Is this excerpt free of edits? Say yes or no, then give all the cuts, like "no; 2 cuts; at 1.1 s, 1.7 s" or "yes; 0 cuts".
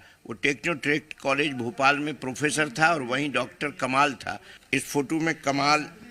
no; 1 cut; at 4.6 s